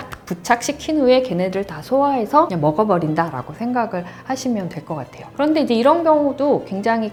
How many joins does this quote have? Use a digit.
0